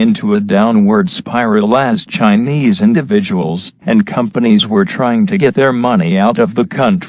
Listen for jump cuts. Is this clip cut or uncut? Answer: cut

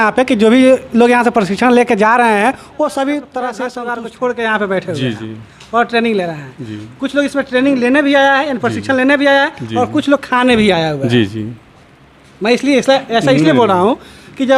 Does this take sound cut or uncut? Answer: cut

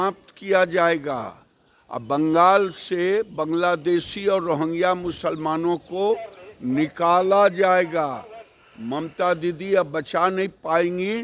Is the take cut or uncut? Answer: uncut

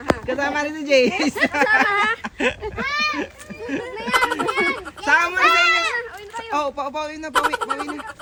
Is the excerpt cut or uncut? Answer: uncut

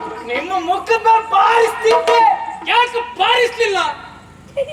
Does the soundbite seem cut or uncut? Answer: uncut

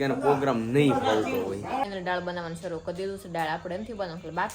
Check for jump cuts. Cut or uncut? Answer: cut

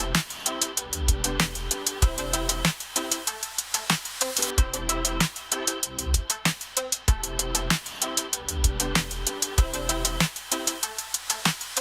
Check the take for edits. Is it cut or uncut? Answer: cut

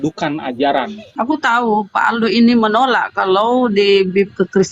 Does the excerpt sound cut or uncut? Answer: cut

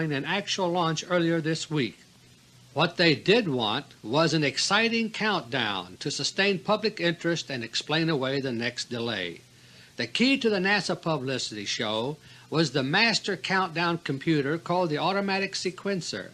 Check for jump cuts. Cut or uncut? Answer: uncut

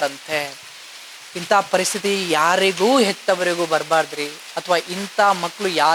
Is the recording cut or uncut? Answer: uncut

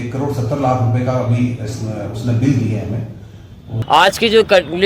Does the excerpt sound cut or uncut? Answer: cut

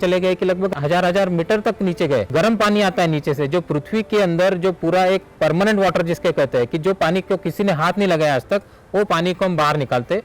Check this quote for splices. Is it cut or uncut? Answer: cut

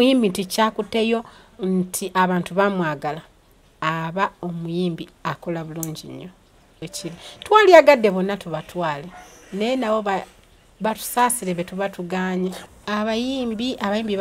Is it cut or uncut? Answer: cut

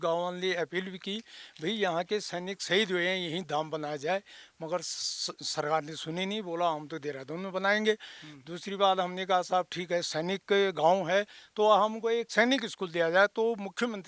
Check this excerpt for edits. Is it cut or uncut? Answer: uncut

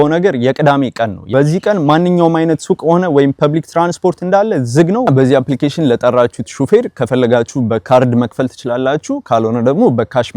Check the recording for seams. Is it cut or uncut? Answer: cut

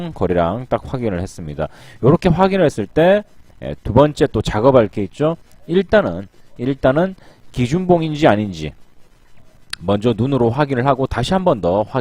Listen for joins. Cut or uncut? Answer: cut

